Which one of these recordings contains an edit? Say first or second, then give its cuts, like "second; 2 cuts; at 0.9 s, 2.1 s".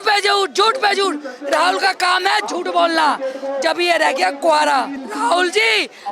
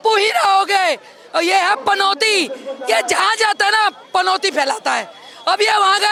first; 1 cut; at 5.0 s